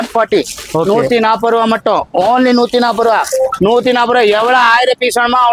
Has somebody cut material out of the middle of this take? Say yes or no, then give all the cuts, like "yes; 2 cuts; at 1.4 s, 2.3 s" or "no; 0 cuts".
no; 0 cuts